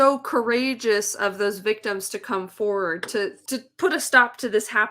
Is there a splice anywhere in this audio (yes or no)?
yes